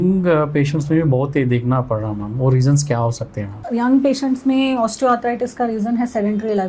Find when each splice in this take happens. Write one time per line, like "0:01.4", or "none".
0:03.6

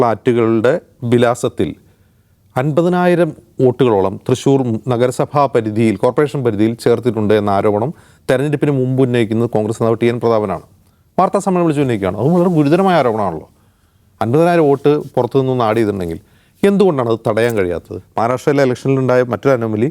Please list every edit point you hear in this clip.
0:18.0

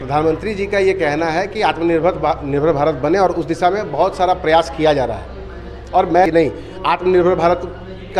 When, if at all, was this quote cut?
0:06.3

